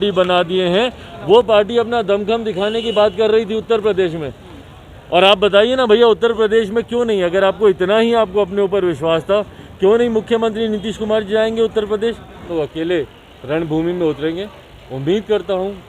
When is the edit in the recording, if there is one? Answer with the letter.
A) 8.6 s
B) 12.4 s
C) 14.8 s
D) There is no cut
B